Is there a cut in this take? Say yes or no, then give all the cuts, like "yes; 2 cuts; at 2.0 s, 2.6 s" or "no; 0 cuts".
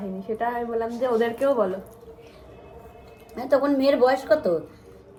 no; 0 cuts